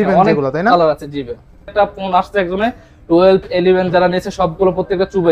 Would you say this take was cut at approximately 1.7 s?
yes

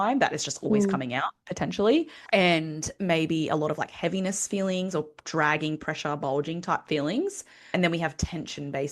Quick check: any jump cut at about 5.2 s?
no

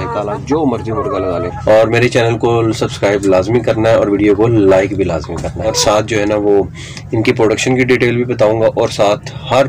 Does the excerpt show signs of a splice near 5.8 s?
yes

